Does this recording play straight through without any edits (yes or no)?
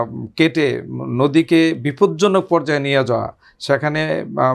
yes